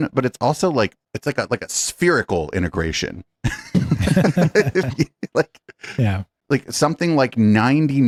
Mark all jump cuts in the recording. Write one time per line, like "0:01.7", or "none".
none